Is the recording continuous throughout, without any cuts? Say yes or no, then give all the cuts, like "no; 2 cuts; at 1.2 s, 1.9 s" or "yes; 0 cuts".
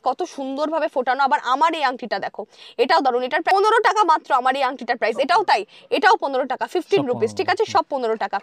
yes; 0 cuts